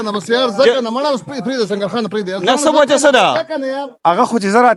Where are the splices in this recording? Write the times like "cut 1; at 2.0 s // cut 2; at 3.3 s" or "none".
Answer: cut 1; at 3.9 s